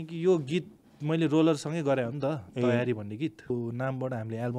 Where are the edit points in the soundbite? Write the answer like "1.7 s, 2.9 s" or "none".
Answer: 3.5 s